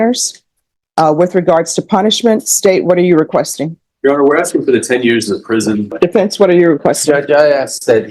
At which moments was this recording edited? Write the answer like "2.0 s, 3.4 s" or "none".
5.9 s